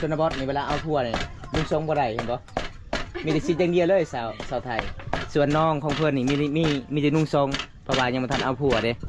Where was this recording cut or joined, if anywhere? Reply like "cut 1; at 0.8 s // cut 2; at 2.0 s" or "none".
none